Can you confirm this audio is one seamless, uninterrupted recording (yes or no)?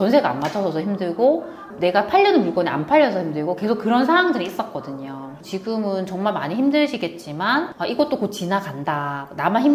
no